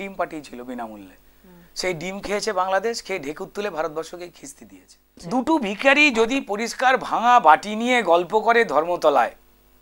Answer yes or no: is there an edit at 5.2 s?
yes